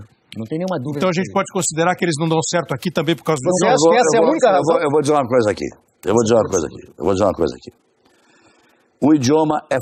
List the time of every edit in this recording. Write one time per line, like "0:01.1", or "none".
none